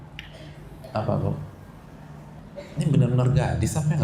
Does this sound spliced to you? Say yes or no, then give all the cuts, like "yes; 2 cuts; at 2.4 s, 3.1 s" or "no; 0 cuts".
yes; 1 cut; at 2.4 s